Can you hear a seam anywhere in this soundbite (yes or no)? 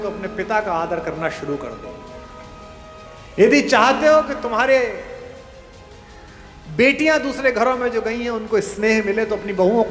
no